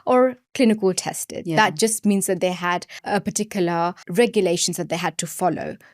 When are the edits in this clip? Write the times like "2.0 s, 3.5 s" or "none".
3.0 s, 4.0 s